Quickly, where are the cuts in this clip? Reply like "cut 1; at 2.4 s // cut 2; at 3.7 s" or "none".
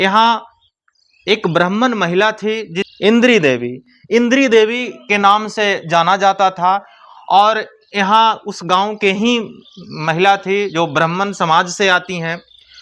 cut 1; at 2.9 s

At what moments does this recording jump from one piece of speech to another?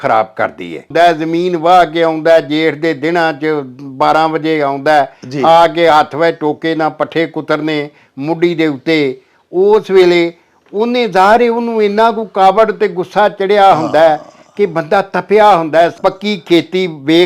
cut 1; at 0.9 s // cut 2; at 15.9 s

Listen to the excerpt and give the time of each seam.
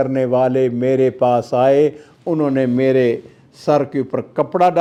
none

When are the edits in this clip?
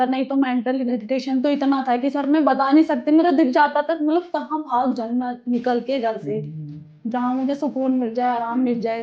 none

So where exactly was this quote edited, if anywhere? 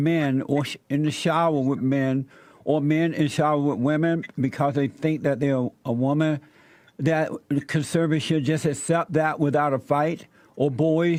none

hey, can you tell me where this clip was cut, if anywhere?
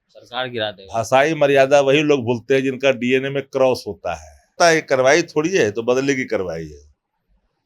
cut 1; at 4.5 s

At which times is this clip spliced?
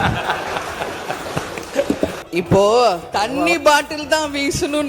cut 1; at 2.1 s

